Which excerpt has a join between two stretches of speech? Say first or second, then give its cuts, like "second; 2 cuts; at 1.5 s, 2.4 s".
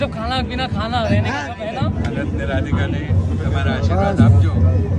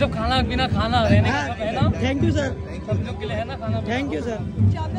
first; 1 cut; at 1.9 s